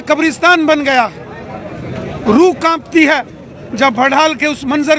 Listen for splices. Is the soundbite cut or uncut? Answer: uncut